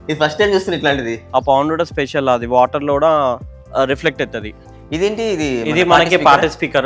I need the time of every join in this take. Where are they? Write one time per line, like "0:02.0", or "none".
0:01.3
0:04.6